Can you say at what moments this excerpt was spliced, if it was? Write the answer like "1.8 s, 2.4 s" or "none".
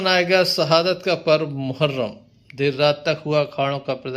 none